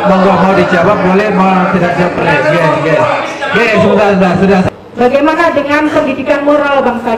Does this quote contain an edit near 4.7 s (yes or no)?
yes